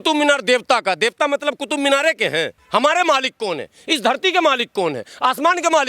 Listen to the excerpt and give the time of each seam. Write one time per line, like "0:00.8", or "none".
0:02.6